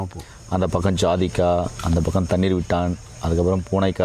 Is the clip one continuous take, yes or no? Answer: yes